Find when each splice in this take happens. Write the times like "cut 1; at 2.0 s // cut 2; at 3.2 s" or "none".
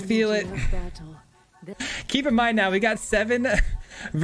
cut 1; at 1.6 s